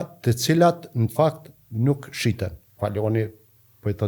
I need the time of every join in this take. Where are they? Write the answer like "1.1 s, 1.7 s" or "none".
2.7 s